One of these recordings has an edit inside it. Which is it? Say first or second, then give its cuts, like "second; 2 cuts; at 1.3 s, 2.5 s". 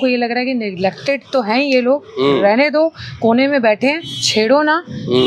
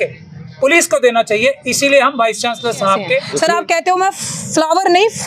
second; 1 cut; at 3.3 s